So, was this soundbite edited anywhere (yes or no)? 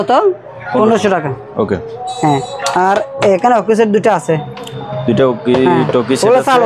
no